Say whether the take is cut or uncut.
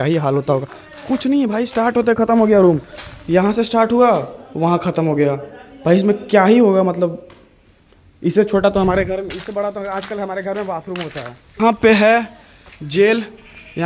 cut